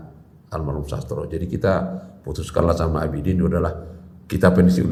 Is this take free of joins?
yes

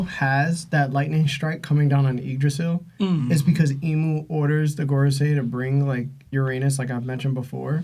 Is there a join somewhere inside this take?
no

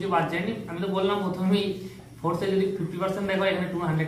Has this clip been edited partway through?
no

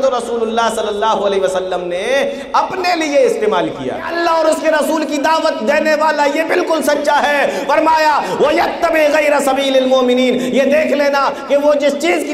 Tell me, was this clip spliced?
yes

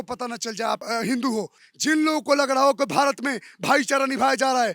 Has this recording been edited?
yes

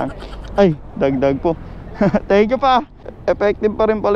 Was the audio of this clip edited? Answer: yes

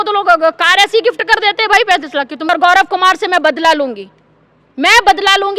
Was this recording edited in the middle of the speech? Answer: yes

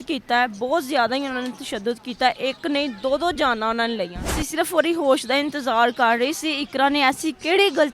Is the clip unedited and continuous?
no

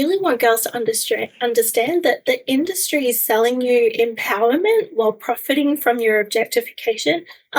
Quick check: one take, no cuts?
yes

